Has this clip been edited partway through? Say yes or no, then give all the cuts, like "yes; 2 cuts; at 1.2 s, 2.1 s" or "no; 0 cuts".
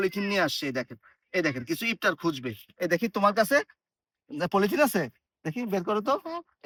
no; 0 cuts